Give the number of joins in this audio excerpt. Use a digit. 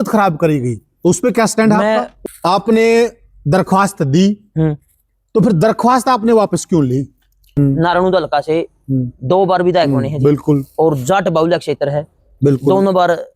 2